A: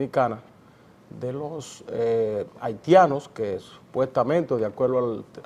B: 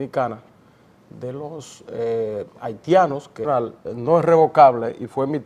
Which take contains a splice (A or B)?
A